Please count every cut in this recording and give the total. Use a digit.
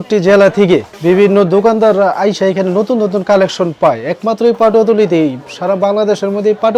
1